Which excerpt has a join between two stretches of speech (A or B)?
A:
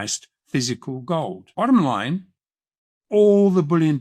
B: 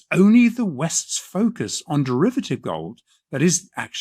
A